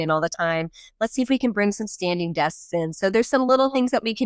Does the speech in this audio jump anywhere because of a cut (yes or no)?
no